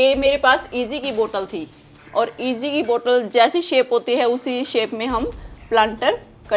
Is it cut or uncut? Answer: uncut